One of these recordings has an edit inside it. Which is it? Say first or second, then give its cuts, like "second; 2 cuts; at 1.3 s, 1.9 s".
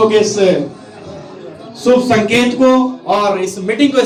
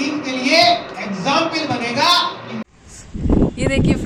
second; 1 cut; at 2.7 s